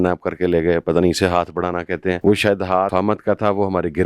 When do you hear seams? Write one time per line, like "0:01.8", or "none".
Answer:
0:02.2
0:02.9